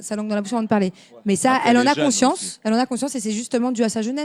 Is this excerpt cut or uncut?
uncut